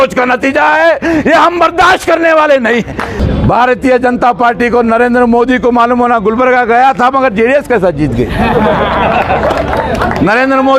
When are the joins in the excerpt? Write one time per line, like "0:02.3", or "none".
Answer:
0:03.2